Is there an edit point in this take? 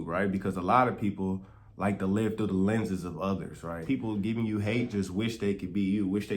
yes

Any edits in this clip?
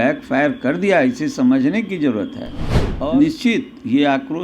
yes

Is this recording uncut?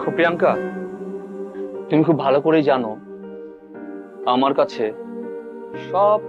no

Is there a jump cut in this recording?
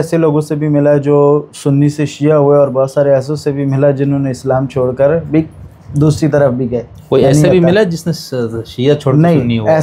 no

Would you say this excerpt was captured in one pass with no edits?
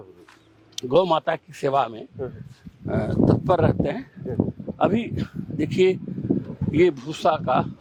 yes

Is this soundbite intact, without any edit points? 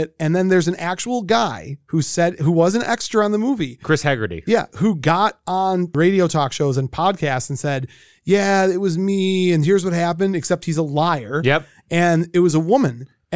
no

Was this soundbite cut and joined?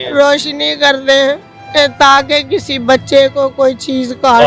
yes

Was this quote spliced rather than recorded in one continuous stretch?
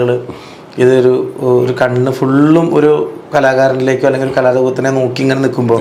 no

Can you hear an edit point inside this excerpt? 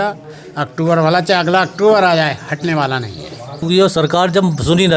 yes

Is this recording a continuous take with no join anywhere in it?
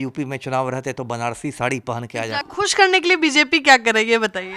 no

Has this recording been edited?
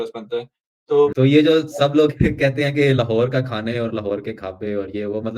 yes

